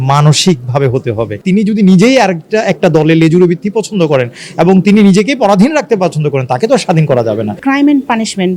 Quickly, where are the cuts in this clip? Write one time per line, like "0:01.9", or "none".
0:01.3
0:07.6